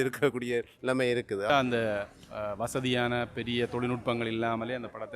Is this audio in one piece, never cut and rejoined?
no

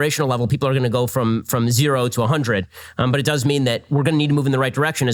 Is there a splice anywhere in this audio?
no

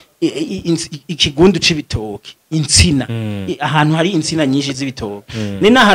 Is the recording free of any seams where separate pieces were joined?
yes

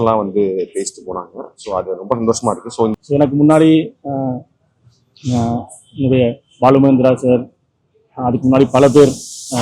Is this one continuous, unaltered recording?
no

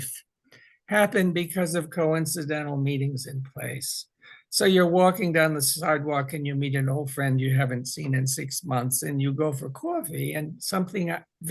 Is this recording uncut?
yes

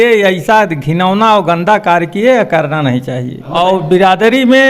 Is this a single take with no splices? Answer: no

